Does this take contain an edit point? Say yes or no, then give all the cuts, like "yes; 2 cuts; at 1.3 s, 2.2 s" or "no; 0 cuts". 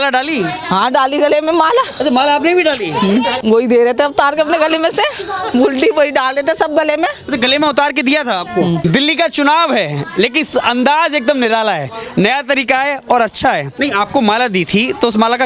yes; 3 cuts; at 3.4 s, 8.8 s, 13.7 s